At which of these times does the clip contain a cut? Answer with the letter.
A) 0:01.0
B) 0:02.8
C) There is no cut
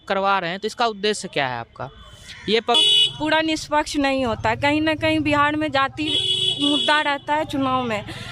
B